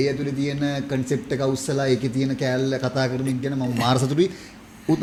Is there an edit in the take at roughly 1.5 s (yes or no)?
no